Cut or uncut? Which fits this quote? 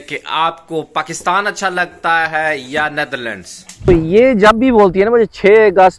cut